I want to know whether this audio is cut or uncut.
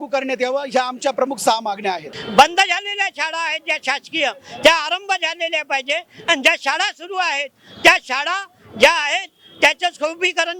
cut